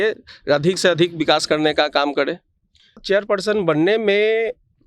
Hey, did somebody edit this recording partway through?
yes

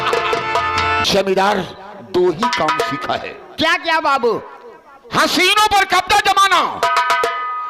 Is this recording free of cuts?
no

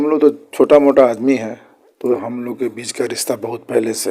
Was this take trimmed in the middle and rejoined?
yes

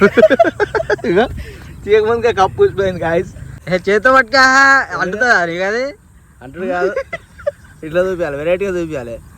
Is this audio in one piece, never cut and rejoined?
no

